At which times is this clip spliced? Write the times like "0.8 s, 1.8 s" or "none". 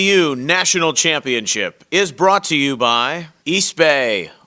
3.2 s